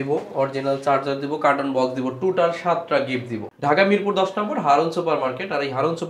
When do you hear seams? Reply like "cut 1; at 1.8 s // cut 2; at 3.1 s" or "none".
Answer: cut 1; at 3.5 s